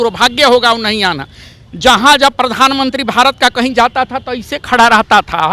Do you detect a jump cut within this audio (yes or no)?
no